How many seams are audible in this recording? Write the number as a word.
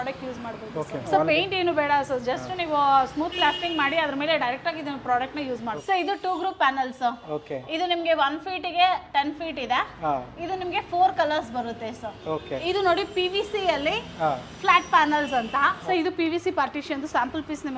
three